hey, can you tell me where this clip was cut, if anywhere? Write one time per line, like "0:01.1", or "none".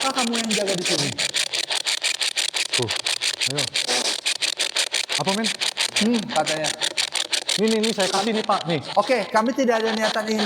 none